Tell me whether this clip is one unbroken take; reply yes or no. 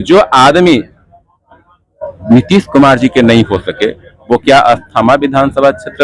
yes